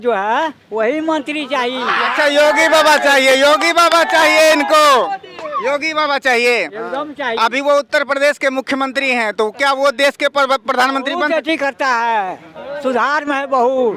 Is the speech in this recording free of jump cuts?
yes; 0 cuts

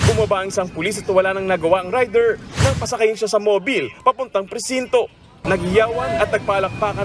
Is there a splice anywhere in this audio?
yes; 1 cut; at 1.5 s

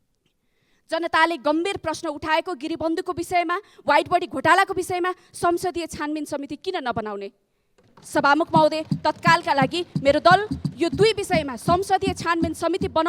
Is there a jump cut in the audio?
no; 0 cuts

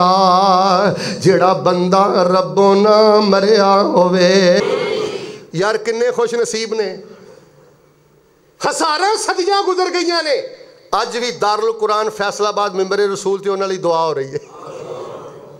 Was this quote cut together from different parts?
yes; 1 cut; at 4.6 s

